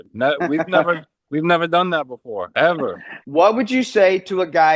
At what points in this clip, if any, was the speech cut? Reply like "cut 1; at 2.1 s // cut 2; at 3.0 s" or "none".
cut 1; at 3.2 s